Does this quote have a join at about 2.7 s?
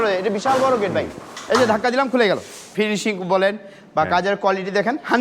yes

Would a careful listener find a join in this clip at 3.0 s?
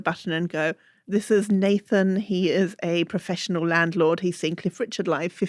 no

